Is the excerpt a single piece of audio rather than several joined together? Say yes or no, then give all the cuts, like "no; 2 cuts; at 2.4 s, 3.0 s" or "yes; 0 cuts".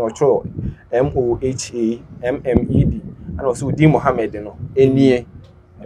yes; 0 cuts